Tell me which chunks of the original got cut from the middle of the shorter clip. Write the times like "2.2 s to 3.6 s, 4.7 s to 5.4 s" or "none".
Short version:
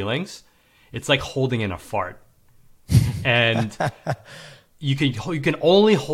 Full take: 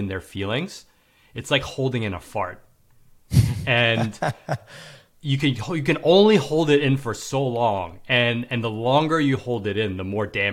none